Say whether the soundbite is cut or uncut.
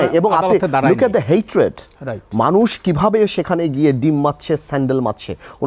uncut